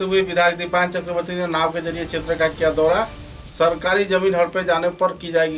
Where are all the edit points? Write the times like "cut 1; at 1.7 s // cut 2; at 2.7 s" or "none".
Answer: none